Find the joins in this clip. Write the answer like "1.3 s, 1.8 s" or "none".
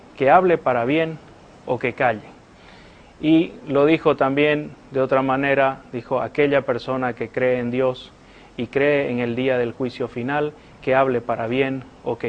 10.0 s

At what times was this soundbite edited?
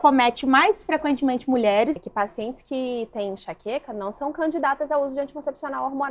2.0 s

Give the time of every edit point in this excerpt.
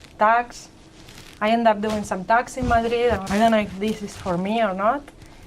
3.2 s

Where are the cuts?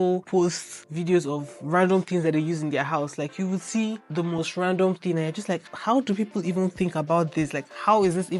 none

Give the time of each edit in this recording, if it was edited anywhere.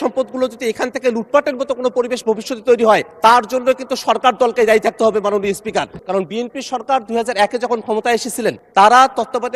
3.1 s, 6.0 s, 8.6 s

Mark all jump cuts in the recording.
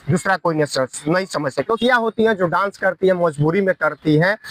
1.8 s

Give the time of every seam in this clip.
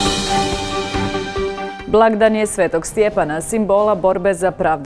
1.6 s

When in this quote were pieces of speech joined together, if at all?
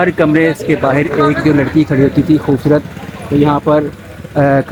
none

